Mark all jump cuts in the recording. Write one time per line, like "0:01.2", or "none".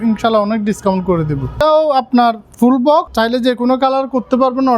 0:01.6
0:03.1

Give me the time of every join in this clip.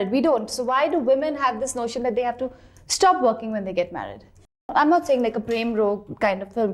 0:04.7

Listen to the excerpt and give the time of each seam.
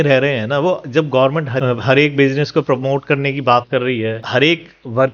0:04.2

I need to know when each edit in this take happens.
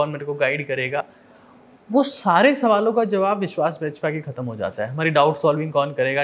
none

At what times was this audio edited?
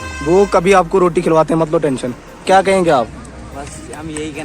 0:02.4

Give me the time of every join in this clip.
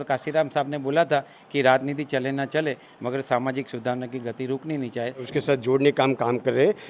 0:05.3

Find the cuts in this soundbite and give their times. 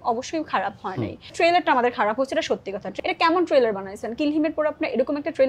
0:01.3
0:02.8

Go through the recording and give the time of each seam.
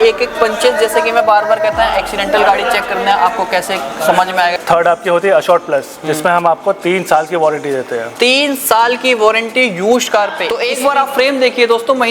0:04.5
0:10.7

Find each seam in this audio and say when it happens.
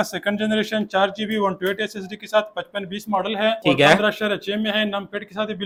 none

